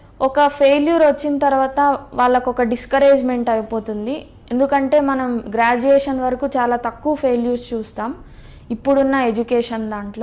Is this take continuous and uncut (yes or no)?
yes